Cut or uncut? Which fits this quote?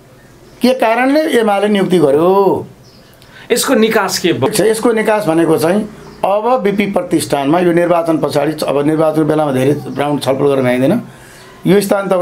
uncut